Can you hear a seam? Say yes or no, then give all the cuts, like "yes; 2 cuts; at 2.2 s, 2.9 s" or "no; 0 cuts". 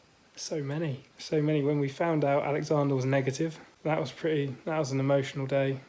yes; 2 cuts; at 1.1 s, 3.7 s